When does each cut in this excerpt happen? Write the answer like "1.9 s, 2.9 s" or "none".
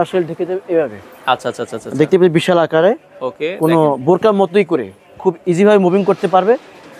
none

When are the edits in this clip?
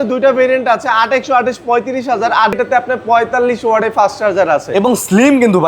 2.6 s

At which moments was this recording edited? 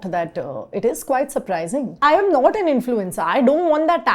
2.0 s

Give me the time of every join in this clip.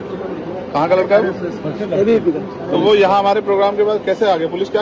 none

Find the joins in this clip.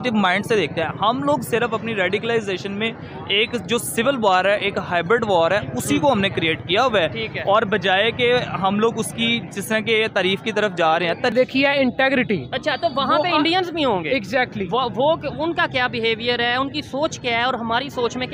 11.3 s

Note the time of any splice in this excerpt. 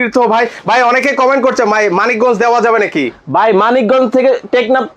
none

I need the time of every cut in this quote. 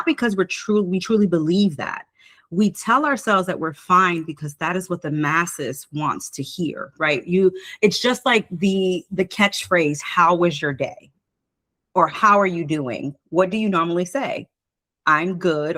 none

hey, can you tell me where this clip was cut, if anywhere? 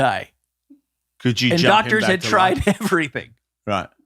none

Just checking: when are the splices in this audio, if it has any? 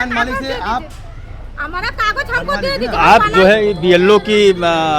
3.0 s

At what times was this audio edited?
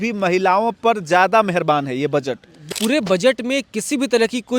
2.7 s

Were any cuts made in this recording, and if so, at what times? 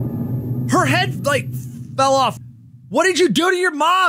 2.3 s

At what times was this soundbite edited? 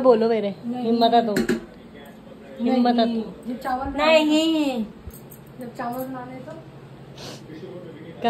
none

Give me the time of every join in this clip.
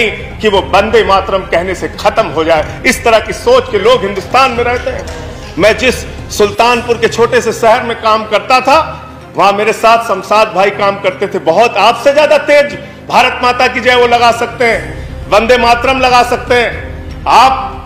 none

